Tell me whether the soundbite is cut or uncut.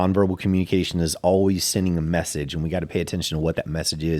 uncut